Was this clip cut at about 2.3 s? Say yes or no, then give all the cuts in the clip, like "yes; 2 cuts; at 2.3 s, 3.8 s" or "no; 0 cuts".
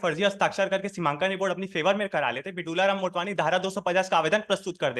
no; 0 cuts